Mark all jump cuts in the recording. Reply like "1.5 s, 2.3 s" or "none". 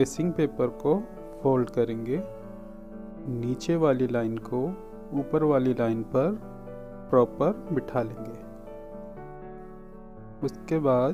8.6 s, 10.4 s